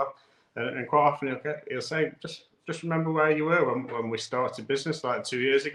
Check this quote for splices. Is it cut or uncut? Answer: uncut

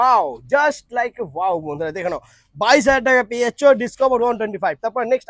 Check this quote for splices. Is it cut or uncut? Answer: uncut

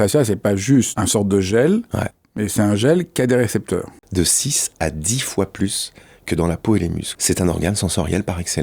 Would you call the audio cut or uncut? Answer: cut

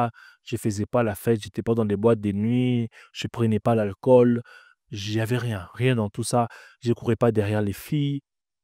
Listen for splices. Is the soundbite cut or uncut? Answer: uncut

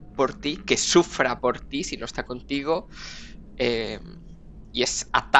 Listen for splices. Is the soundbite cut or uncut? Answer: uncut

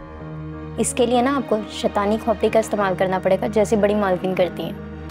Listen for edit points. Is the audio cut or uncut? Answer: uncut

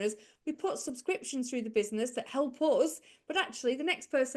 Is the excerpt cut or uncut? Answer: uncut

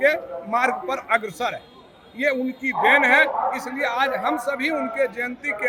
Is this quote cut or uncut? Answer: uncut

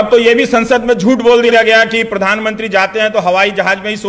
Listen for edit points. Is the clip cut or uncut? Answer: uncut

